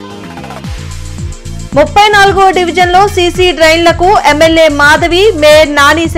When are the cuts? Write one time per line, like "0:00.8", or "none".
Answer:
none